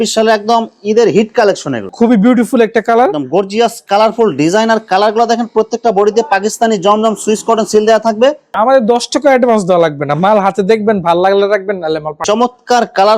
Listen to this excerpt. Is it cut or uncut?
cut